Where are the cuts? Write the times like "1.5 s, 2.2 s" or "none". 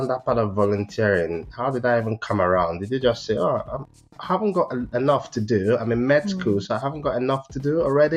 none